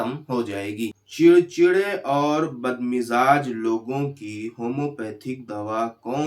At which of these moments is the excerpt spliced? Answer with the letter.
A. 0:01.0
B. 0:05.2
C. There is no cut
A